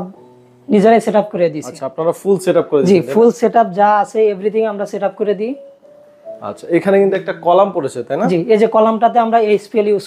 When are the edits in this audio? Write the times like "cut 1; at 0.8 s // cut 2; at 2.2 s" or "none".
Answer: none